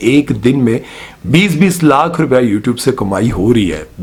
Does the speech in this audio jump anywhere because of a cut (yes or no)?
no